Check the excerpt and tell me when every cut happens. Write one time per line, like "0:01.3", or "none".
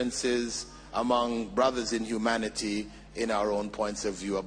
none